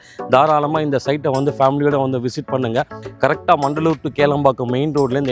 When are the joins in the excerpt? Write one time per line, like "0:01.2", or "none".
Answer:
0:02.9